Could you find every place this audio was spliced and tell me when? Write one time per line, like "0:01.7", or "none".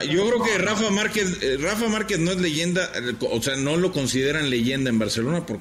none